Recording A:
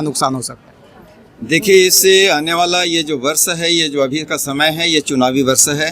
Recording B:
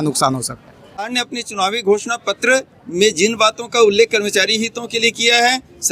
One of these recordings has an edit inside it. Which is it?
B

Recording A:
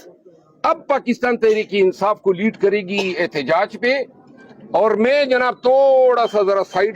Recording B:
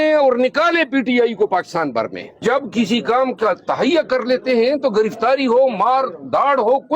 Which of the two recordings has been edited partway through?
B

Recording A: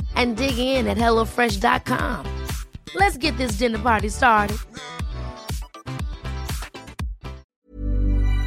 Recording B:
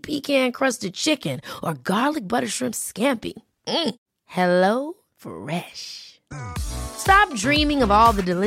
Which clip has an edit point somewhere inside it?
A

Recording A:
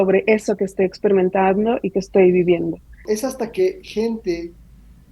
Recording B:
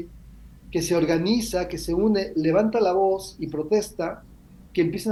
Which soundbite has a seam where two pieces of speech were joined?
A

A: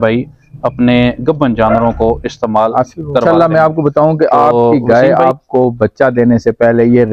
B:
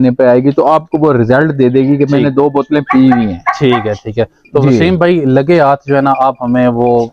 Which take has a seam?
A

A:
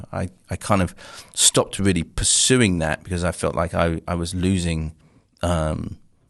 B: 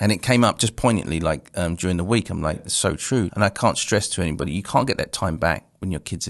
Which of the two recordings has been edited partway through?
B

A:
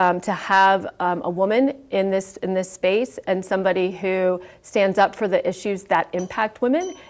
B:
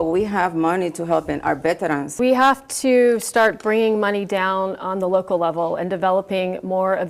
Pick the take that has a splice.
B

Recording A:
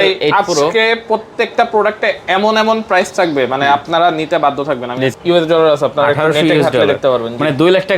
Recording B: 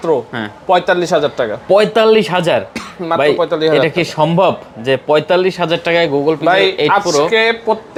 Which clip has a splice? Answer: A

